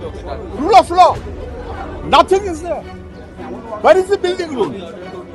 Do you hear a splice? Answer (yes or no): no